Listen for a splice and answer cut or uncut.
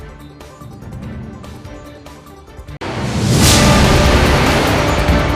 uncut